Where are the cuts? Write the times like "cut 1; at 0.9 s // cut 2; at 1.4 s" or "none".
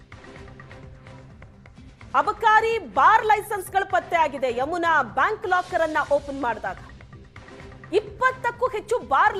cut 1; at 1.2 s